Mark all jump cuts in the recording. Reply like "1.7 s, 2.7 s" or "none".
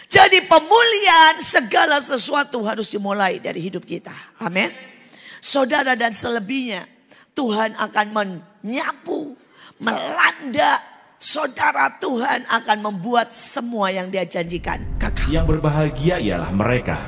15.2 s